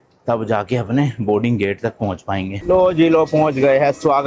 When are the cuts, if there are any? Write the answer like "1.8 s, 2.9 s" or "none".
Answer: 2.6 s

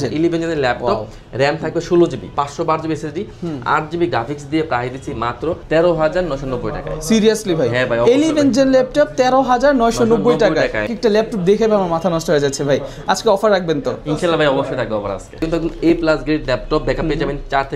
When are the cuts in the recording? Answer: 2.4 s, 5.6 s, 10.9 s, 15.4 s

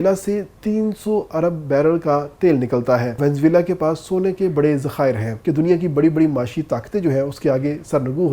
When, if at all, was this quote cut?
3.2 s, 5.3 s

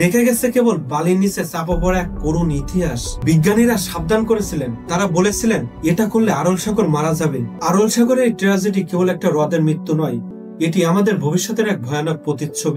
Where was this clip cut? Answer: 3.1 s, 7.5 s

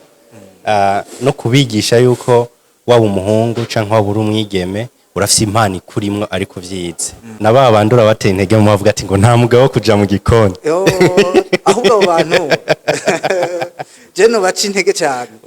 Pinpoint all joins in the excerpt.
7.4 s

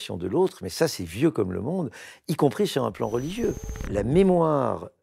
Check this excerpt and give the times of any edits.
3.9 s

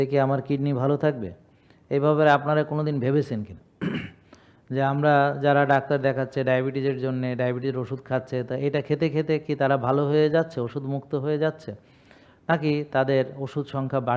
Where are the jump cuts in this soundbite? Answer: none

